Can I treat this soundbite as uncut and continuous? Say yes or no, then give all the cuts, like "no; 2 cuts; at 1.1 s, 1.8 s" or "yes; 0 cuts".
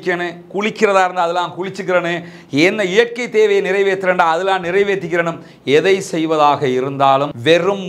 yes; 0 cuts